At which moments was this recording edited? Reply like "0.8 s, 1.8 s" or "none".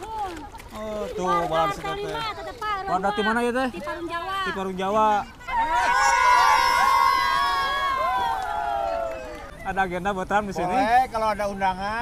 5.4 s, 9.5 s